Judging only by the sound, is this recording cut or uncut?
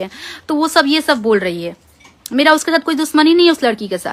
uncut